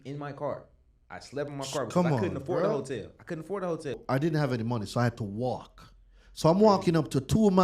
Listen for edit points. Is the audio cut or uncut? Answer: cut